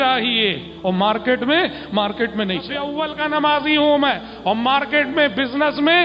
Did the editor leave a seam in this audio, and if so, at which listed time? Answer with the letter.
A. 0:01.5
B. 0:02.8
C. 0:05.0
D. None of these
B